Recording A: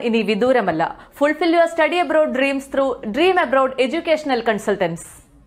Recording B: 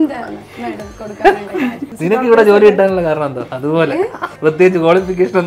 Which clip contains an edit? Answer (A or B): B